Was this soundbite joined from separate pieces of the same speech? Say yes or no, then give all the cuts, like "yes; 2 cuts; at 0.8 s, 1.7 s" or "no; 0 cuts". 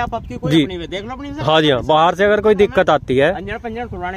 no; 0 cuts